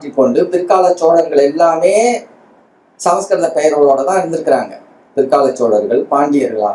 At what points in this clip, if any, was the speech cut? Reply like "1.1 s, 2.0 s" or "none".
none